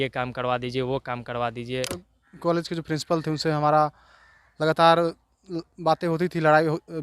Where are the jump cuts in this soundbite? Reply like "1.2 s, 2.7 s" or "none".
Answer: 2.1 s